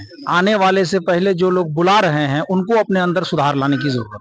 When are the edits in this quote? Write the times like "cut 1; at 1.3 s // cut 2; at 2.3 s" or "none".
none